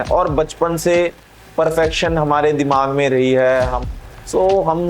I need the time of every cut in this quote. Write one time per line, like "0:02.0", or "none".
0:03.8